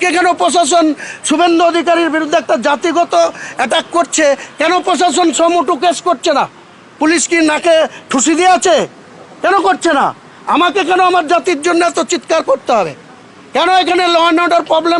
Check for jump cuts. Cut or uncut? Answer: uncut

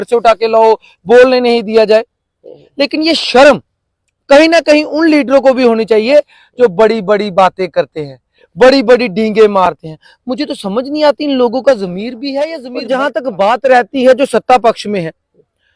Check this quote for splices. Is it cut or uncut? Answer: cut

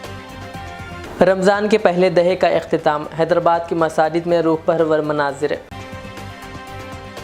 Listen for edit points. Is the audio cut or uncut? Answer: cut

